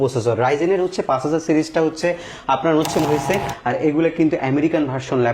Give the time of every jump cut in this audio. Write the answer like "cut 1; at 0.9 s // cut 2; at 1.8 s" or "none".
cut 1; at 3.0 s

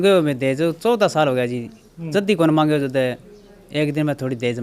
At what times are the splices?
none

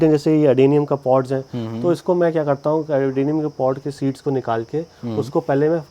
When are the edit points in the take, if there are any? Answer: none

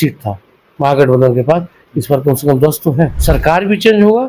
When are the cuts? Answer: cut 1; at 3.2 s

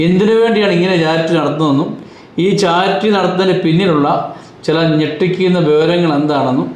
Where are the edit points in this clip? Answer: none

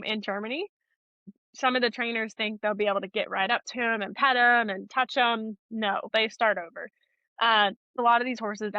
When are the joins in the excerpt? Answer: cut 1; at 1.2 s // cut 2; at 6.1 s // cut 3; at 8.0 s

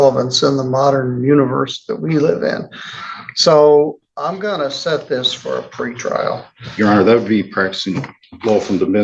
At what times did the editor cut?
none

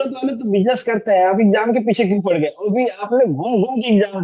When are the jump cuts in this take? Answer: none

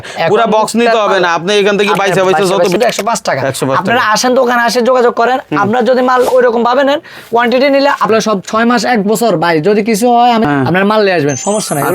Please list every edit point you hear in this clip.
cut 1; at 2.8 s // cut 2; at 8.1 s // cut 3; at 10.4 s

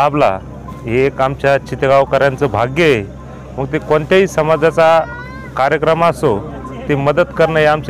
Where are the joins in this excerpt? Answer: none

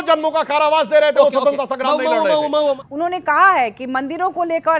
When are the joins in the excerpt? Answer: cut 1; at 2.8 s

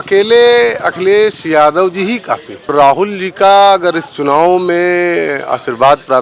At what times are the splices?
cut 1; at 2.7 s

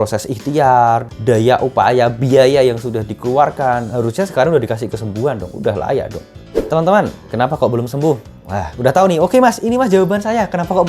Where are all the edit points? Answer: cut 1; at 1.1 s // cut 2; at 6.5 s

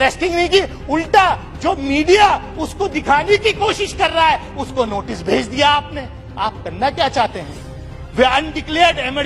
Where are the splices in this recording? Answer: none

